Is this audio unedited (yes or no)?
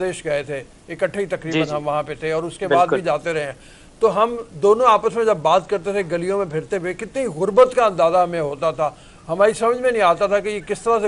yes